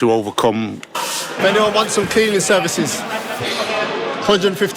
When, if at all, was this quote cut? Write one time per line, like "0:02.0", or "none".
0:01.3